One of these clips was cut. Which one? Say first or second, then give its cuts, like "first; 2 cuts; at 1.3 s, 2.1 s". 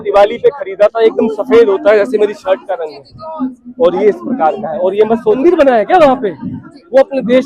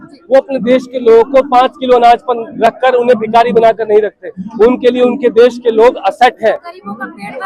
first; 1 cut; at 5.4 s